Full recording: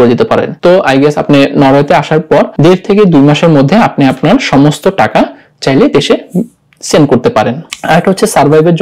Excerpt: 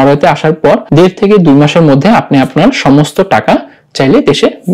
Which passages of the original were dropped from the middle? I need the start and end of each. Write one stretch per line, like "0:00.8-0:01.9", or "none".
none